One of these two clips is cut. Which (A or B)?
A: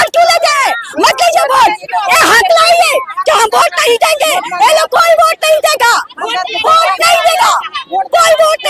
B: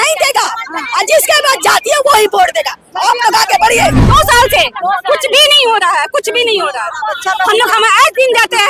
B